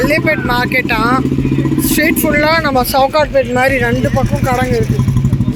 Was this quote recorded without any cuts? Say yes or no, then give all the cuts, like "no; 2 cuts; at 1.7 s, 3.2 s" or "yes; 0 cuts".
yes; 0 cuts